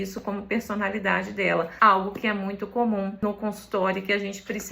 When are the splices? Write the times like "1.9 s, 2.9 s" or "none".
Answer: 1.7 s, 3.2 s